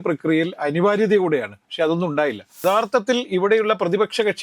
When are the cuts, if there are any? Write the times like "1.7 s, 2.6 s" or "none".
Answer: 2.6 s